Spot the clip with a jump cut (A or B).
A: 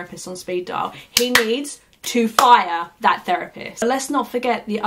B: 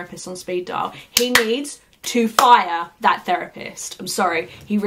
A